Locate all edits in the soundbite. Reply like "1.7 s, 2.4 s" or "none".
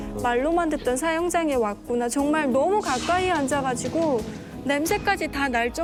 none